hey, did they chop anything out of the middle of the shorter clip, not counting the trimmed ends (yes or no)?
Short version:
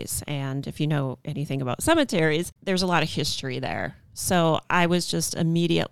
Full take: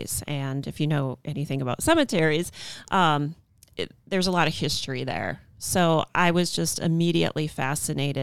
yes